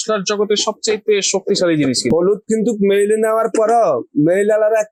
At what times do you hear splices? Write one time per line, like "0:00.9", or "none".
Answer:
none